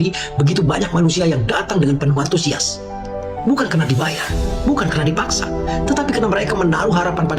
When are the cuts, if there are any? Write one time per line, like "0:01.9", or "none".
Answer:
none